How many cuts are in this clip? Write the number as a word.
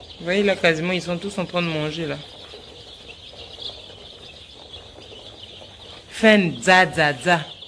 zero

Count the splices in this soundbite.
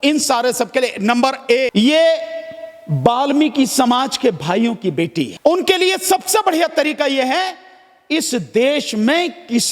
two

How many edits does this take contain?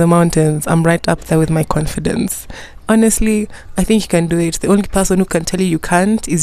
one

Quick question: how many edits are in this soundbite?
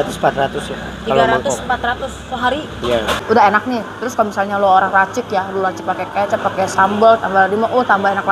one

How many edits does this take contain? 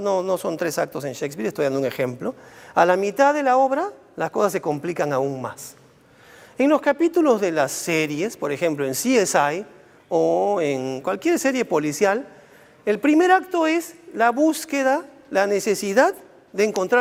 zero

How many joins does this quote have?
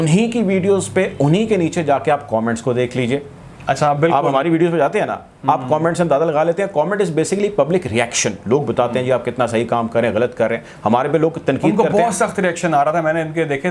zero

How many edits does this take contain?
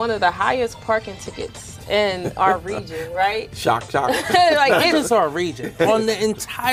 zero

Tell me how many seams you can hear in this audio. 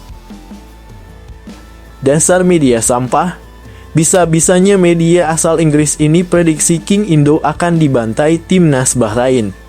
one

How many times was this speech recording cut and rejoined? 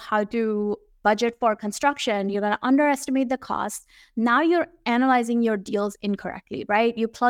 one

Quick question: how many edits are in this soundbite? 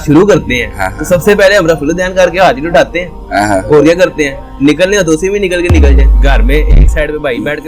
one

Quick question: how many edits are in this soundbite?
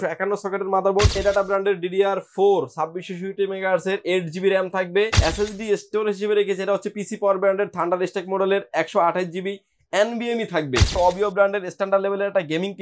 three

